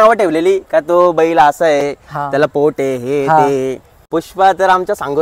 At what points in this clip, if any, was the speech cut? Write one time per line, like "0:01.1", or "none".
0:03.9